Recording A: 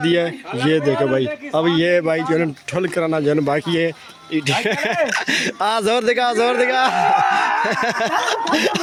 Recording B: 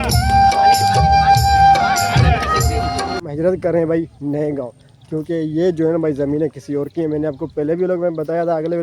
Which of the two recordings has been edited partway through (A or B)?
B